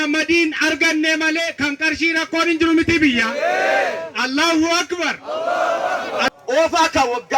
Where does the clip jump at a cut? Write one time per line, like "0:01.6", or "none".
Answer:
0:06.3